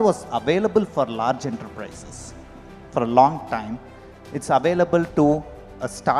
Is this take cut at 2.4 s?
no; 0 cuts

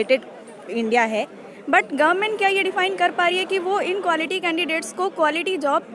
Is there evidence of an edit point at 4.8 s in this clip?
no; 1 cut; at 1.4 s

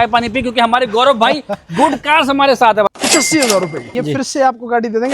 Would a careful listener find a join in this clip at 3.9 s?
yes; 2 cuts; at 2.9 s, 3.9 s

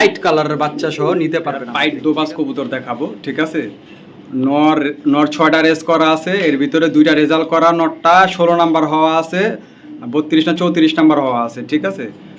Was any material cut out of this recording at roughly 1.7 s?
yes; 1 cut; at 1.7 s

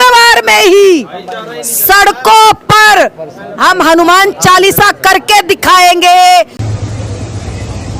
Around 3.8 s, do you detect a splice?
no; 1 cut; at 6.6 s

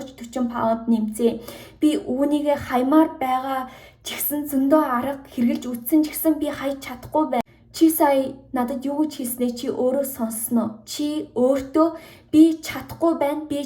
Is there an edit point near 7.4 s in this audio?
yes; 1 cut; at 7.4 s

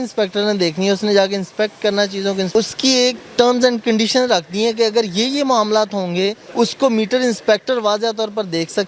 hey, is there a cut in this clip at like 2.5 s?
yes; 2 cuts; at 2.5 s, 6.4 s

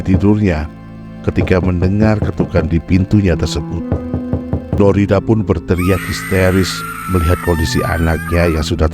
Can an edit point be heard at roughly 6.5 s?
no; 1 cut; at 4.8 s

